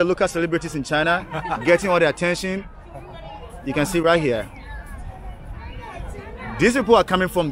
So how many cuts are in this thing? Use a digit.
0